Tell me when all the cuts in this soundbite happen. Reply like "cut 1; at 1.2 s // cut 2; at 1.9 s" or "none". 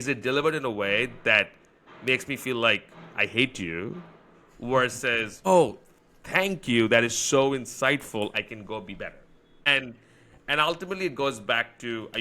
cut 1; at 5.3 s // cut 2; at 9.7 s